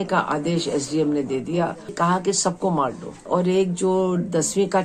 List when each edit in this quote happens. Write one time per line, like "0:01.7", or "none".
0:01.9
0:03.2